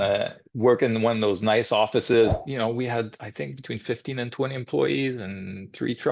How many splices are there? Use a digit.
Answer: 1